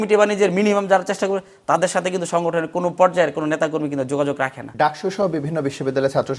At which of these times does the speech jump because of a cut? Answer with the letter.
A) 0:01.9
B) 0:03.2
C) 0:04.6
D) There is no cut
C